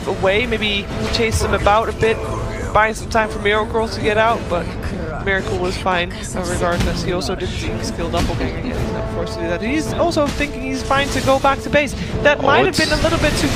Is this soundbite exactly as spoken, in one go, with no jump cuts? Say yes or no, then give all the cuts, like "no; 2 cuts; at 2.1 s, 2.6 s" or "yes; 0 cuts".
no; 1 cut; at 12.2 s